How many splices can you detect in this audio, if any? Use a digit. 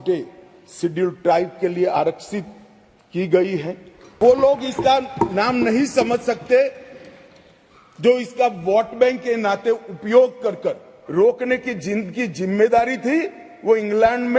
2